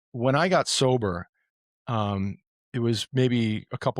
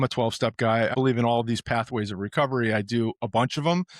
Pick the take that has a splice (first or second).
second